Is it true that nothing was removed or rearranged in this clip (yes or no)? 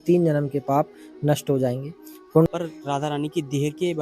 no